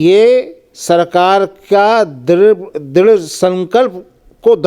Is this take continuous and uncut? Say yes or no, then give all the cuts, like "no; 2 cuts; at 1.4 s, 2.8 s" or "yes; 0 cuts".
yes; 0 cuts